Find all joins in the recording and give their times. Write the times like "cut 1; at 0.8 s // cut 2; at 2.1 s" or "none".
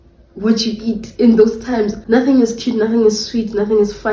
cut 1; at 2.0 s